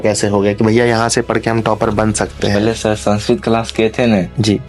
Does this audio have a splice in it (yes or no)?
no